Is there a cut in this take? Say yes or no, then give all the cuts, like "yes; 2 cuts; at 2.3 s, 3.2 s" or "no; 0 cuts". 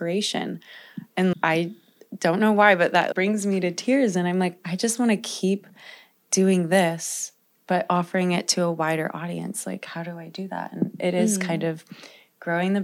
yes; 2 cuts; at 1.3 s, 3.1 s